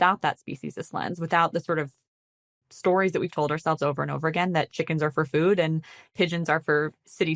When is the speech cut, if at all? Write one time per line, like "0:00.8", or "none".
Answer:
0:06.1